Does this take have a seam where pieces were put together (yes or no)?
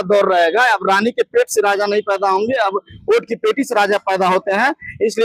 no